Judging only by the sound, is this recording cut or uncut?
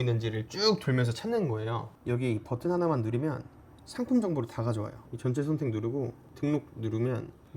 cut